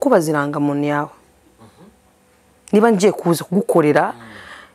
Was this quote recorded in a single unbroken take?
yes; 0 cuts

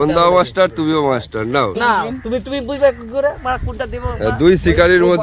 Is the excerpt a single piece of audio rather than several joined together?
no; 1 cut; at 1.8 s

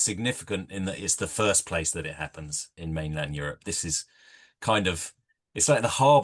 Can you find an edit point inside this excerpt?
yes; 1 cut; at 2.8 s

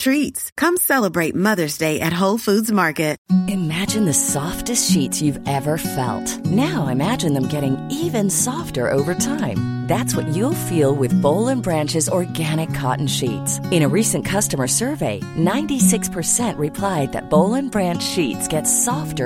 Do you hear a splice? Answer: yes; 1 cut; at 3.2 s

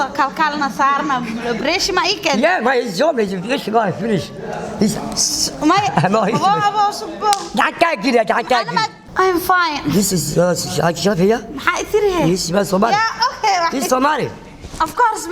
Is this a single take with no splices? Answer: no; 1 cut; at 9.0 s

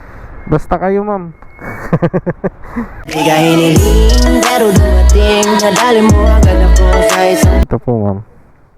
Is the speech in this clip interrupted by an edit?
yes; 1 cut; at 7.6 s

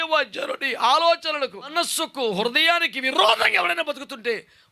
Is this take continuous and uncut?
no; 1 cut; at 1.7 s

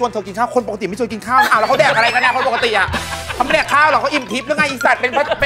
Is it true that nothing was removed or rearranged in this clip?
yes; 0 cuts

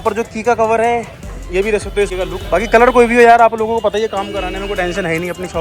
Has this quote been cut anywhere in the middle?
yes; 1 cut; at 2.1 s

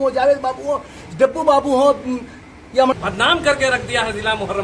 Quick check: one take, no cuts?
no; 1 cut; at 2.9 s

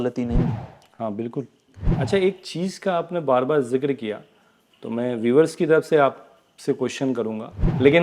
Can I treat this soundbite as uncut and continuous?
no; 1 cut; at 2.0 s

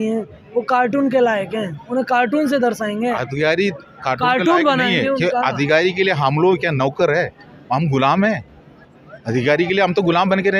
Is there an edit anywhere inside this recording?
no; 0 cuts

